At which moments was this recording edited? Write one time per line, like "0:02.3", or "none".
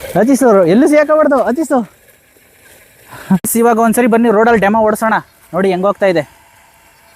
0:03.5